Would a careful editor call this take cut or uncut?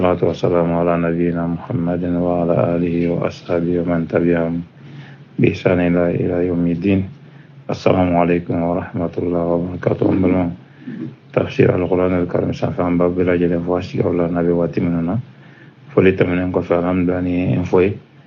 cut